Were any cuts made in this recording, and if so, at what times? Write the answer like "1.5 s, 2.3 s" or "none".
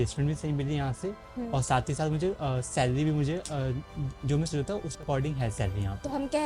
none